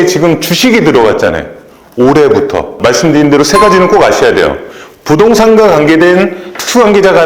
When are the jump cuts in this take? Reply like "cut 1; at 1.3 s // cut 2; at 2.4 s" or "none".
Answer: cut 1; at 2.8 s